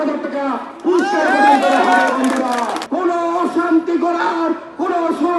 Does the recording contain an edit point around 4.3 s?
no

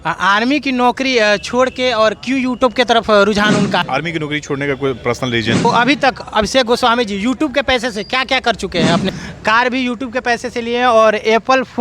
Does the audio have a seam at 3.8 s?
yes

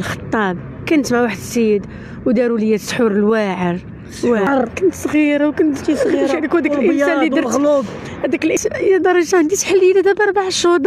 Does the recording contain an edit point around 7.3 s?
no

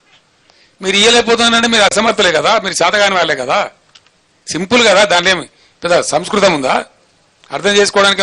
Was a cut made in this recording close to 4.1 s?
no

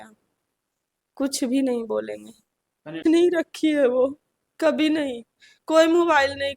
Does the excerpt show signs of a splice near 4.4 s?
no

